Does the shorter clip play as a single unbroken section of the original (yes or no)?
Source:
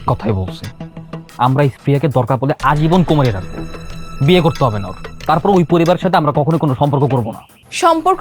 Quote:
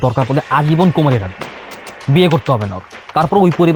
yes